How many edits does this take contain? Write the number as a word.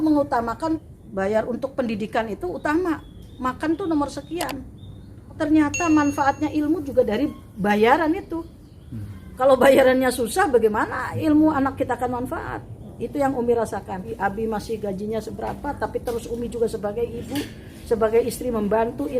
three